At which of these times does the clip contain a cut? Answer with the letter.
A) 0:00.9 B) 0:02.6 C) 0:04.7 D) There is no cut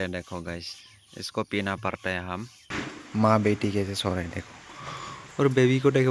B